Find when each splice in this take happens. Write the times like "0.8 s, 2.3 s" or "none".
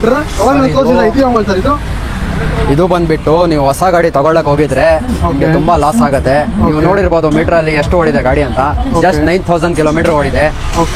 none